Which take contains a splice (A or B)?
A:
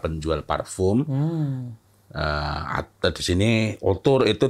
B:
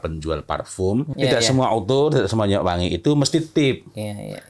B